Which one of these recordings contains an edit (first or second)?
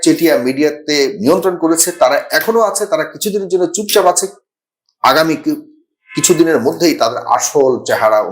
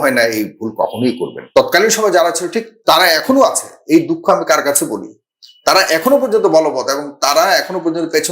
second